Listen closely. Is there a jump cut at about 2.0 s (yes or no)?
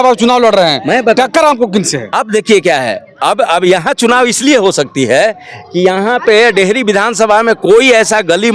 no